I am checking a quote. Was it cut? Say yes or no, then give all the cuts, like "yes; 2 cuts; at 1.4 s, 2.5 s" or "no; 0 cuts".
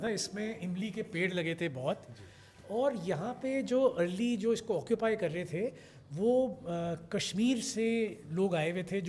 no; 0 cuts